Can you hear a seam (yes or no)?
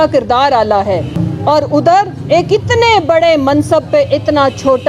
yes